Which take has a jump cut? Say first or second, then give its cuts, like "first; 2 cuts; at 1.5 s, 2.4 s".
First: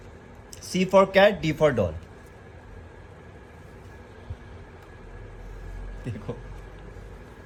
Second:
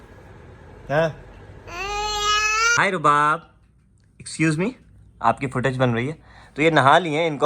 second; 1 cut; at 2.7 s